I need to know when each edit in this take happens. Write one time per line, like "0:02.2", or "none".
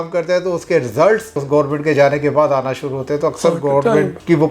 0:01.4